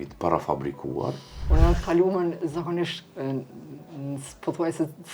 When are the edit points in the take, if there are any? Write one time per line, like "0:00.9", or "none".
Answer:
0:01.3